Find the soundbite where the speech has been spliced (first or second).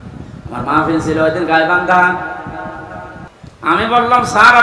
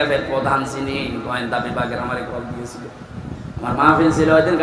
first